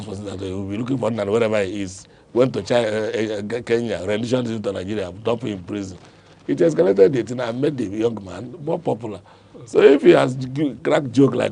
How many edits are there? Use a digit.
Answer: 0